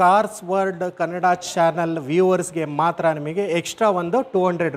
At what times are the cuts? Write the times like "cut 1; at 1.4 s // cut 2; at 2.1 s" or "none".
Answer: none